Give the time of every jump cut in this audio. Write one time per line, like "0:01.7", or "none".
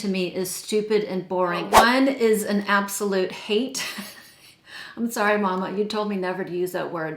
0:01.7